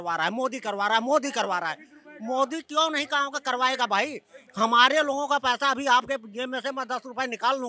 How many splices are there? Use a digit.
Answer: 0